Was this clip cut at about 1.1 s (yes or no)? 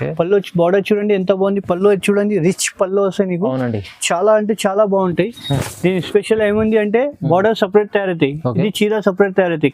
no